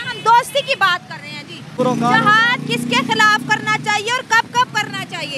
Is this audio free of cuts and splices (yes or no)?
no